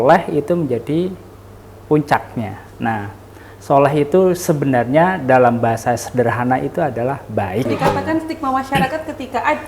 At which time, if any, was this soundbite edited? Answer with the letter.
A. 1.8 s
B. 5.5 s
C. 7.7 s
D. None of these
C